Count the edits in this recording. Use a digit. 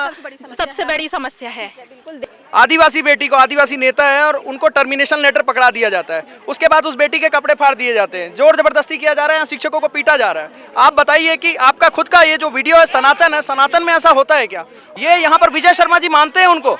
2